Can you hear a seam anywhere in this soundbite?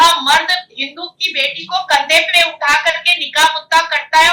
no; 0 cuts

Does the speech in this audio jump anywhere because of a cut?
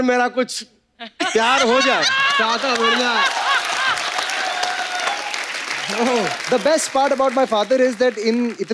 yes; 1 cut; at 6.4 s

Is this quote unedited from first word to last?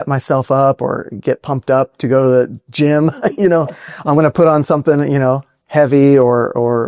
yes; 0 cuts

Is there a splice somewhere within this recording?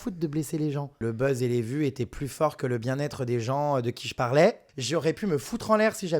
yes; 2 cuts; at 1.0 s, 4.7 s

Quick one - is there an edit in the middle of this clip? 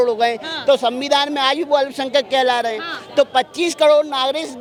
no; 0 cuts

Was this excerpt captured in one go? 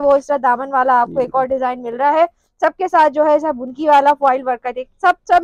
yes; 0 cuts

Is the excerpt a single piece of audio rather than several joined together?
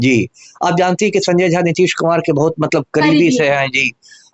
yes; 0 cuts

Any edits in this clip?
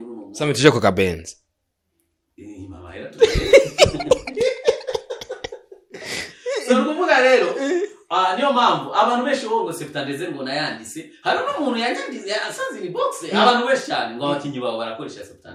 no; 0 cuts

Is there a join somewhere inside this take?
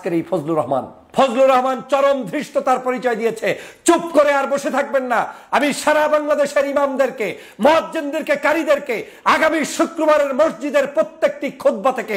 yes; 1 cut; at 1.0 s

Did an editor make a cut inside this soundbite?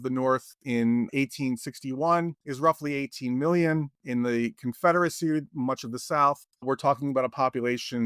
yes; 1 cut; at 2.4 s

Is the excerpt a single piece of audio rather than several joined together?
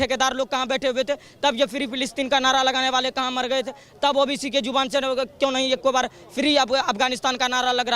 yes; 0 cuts

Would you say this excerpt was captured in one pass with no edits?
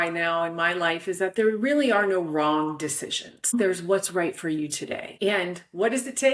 no; 2 cuts; at 3.5 s, 5.0 s

